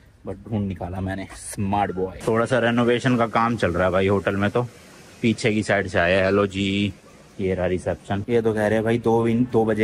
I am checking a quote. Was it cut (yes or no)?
no